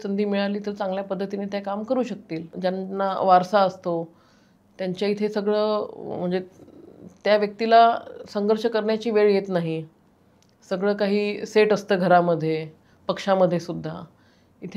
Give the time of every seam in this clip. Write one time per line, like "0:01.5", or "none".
0:02.5